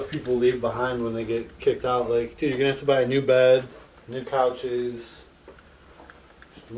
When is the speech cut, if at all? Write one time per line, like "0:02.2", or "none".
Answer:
none